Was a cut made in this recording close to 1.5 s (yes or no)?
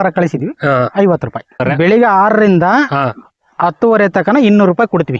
yes